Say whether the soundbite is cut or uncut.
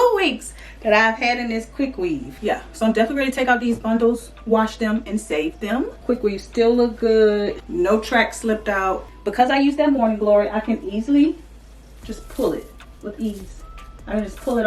cut